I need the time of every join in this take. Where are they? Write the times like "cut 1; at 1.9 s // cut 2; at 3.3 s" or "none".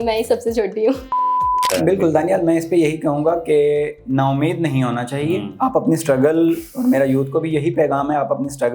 cut 1; at 1.5 s